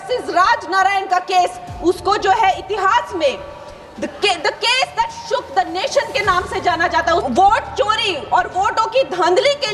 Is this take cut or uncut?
cut